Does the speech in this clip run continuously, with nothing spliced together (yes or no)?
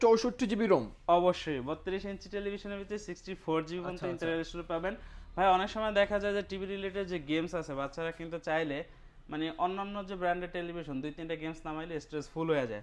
yes